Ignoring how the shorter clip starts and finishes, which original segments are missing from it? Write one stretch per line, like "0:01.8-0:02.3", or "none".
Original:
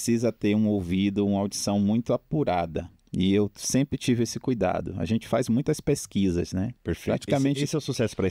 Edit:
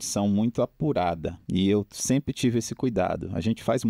0:02.9-0:03.0